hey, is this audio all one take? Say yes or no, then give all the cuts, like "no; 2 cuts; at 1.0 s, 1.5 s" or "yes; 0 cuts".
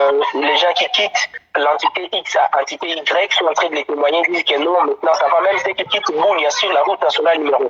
yes; 0 cuts